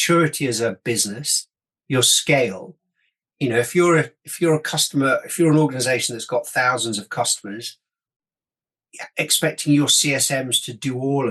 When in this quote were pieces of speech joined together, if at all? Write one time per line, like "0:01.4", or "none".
none